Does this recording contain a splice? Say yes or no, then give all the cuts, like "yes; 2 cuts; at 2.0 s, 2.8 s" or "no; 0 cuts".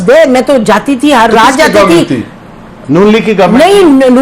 no; 0 cuts